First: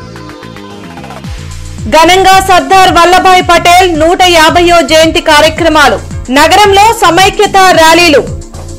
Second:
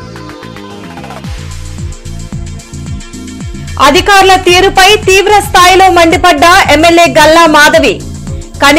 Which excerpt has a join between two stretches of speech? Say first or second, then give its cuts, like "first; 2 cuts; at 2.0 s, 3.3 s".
first; 1 cut; at 1.6 s